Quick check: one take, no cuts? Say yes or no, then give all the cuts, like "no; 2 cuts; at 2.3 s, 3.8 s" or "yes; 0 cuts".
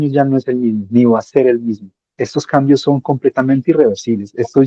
yes; 0 cuts